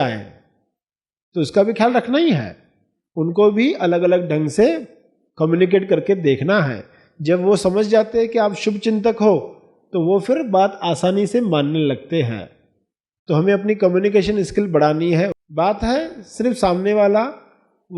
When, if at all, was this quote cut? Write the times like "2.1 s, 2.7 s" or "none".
15.4 s

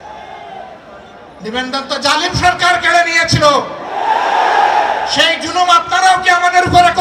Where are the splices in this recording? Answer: none

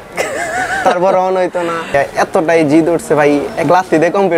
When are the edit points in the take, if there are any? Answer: 1.9 s

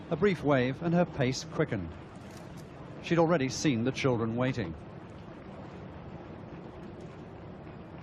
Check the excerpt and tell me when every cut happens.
none

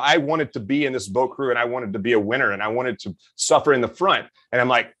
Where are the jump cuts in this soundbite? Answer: none

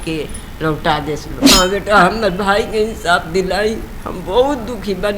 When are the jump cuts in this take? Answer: 1.3 s

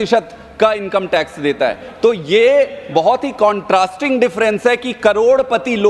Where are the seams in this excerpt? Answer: none

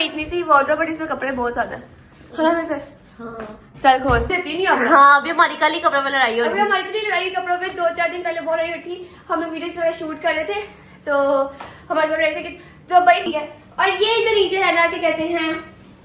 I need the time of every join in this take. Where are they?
4.4 s, 13.2 s

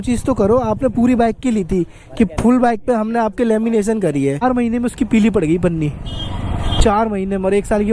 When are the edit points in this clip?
4.4 s

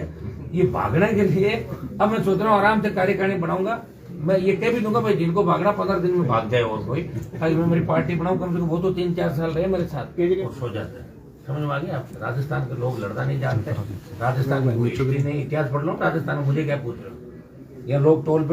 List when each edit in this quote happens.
10.4 s

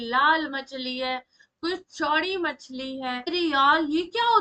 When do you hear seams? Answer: 3.3 s

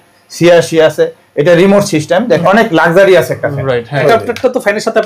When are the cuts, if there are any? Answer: 2.4 s, 4.0 s

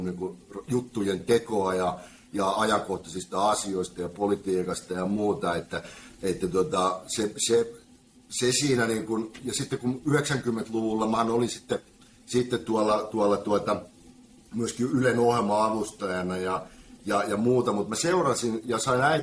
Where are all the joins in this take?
none

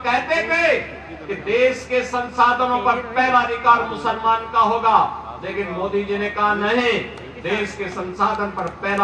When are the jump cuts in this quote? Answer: none

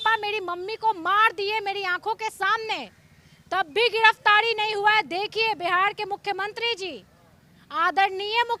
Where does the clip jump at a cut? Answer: none

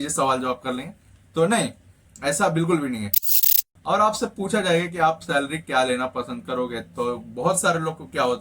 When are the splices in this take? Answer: 3.5 s

